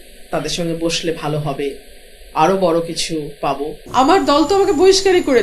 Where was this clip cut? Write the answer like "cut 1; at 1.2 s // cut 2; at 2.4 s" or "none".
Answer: cut 1; at 3.8 s